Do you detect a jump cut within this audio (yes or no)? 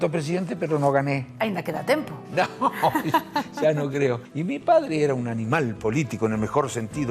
yes